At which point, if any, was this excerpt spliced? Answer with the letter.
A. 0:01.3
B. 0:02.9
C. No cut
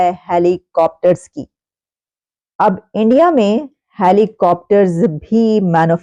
C